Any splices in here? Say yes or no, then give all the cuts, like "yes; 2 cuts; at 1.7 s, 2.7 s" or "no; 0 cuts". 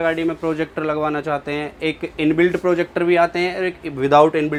no; 0 cuts